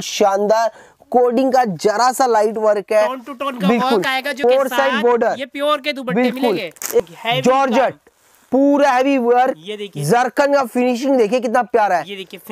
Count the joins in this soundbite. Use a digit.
2